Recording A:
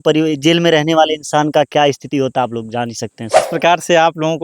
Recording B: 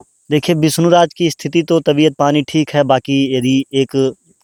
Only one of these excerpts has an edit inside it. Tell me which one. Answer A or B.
A